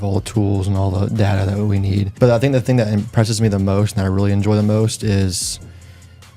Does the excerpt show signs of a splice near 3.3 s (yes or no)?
no